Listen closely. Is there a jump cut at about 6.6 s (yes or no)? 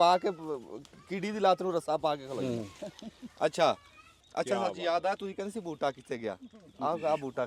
no